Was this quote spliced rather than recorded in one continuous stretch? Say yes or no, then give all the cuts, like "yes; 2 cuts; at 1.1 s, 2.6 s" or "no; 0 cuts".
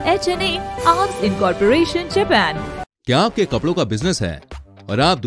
yes; 1 cut; at 2.9 s